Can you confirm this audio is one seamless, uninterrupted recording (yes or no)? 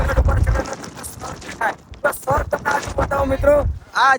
yes